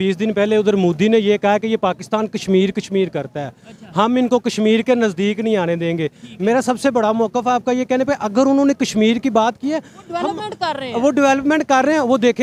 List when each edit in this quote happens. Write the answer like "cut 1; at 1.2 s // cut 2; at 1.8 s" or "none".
none